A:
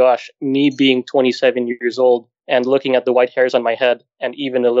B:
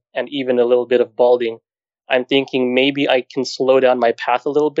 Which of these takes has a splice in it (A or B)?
A